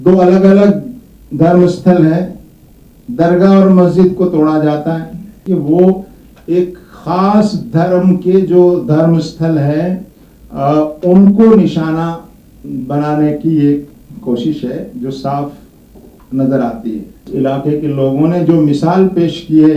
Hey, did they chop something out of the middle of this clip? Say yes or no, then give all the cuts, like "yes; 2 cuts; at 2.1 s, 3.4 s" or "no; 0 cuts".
yes; 2 cuts; at 5.3 s, 17.3 s